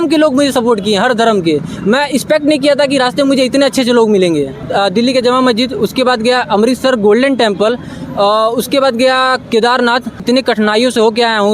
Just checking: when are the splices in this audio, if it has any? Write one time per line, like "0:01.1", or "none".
0:04.6
0:10.2